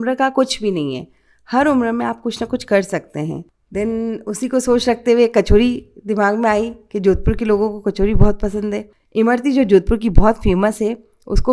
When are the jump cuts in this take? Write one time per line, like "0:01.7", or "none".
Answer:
0:03.5
0:08.9